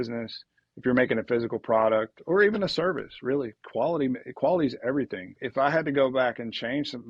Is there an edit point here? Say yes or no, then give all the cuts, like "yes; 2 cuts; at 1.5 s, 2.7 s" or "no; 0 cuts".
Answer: yes; 1 cut; at 5.4 s